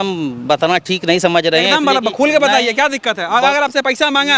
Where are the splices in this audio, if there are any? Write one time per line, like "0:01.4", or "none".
none